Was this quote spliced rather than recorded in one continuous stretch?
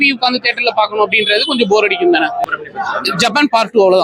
yes; 1 cut; at 2.4 s

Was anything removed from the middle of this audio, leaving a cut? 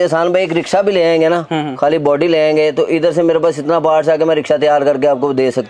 no; 0 cuts

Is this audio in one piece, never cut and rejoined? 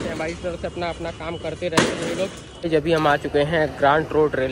no; 1 cut; at 2.5 s

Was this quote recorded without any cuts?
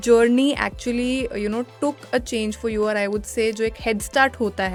yes; 0 cuts

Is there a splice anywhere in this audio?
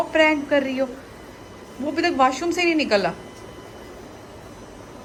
no; 0 cuts

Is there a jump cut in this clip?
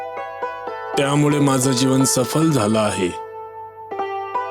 no; 0 cuts

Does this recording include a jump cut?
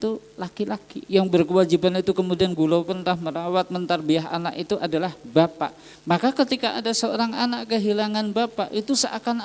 yes; 1 cut; at 0.9 s

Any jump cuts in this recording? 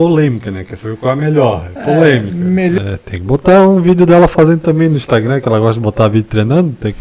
yes; 1 cut; at 2.8 s

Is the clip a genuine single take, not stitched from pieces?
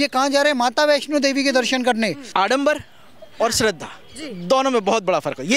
no; 1 cut; at 2.2 s

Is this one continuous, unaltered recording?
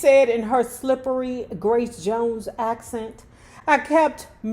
yes; 0 cuts

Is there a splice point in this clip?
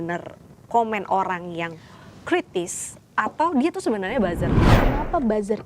yes; 1 cut; at 4.7 s

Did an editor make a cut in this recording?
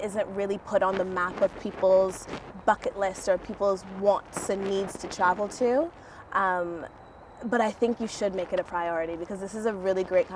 no; 0 cuts

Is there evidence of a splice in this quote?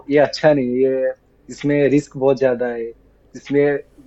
no; 0 cuts

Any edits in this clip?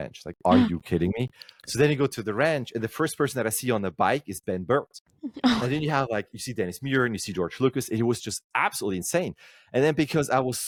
no; 0 cuts

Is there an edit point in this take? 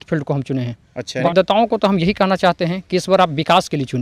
yes; 1 cut; at 1.2 s

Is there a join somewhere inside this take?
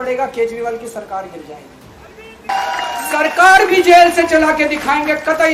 yes; 1 cut; at 2.5 s

